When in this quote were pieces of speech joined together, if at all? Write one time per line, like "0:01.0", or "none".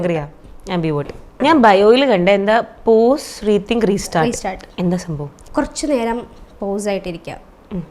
0:01.4
0:05.3